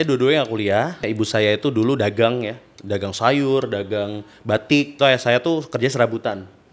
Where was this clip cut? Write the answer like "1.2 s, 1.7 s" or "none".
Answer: 1.1 s, 4.9 s